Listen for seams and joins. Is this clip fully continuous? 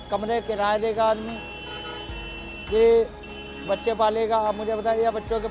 yes; 0 cuts

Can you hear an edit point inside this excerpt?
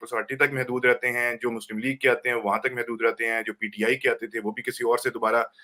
no; 0 cuts

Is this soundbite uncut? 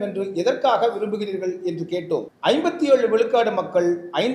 no; 1 cut; at 2.3 s

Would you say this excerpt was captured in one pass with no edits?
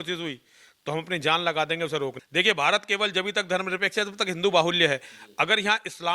no; 1 cut; at 2.2 s

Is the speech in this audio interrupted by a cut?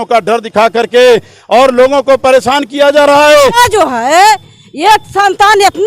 yes; 1 cut; at 3.6 s

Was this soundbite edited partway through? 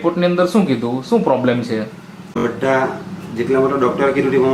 yes; 1 cut; at 2.4 s

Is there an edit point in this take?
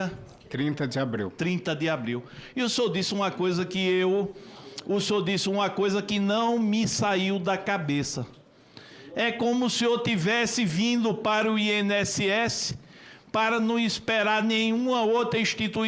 no; 0 cuts

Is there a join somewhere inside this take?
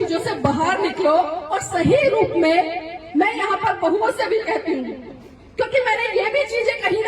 no; 0 cuts

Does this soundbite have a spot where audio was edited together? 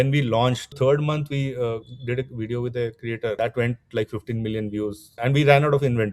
yes; 3 cuts; at 0.7 s, 3.4 s, 5.2 s

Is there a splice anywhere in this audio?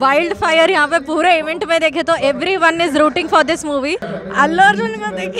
yes; 1 cut; at 4.1 s

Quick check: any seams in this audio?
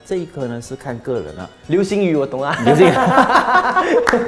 no; 0 cuts

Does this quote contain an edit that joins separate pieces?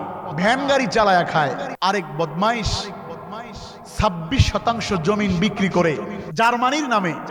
yes; 2 cuts; at 1.7 s, 6.2 s

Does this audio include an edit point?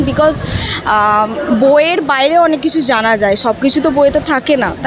no; 0 cuts

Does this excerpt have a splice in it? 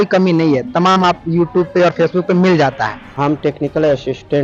yes; 1 cut; at 3.0 s

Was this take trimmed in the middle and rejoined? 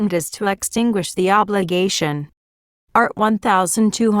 yes; 2 cuts; at 1.4 s, 2.9 s

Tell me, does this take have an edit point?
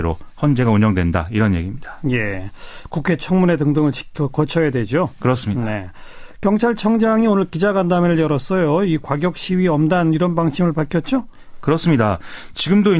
yes; 1 cut; at 9.8 s

